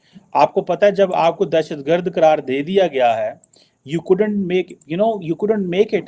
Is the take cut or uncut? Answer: uncut